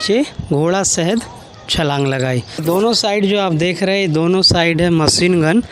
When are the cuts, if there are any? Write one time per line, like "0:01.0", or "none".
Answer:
0:02.6